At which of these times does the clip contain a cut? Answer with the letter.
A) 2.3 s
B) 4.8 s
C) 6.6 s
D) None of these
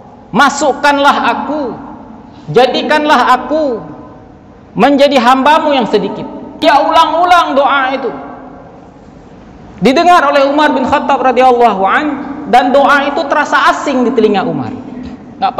C